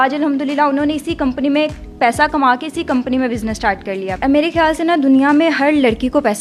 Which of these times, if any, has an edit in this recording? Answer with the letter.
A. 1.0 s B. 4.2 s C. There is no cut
B